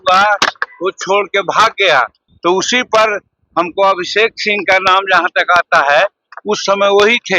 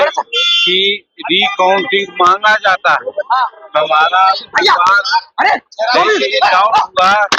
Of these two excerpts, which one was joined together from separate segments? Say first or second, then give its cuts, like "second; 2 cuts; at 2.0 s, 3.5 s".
first; 1 cut; at 2.2 s